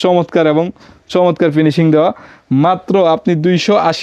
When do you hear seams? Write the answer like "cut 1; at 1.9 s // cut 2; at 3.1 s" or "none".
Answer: none